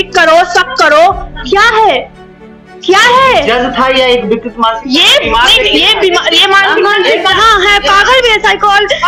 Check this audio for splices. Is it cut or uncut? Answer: uncut